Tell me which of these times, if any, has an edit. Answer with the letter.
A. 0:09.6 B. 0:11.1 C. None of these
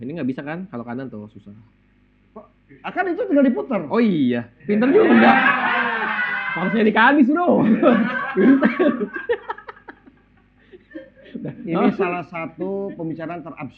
C